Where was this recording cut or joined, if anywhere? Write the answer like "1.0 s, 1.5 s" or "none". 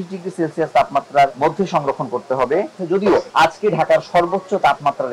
1.3 s, 3.0 s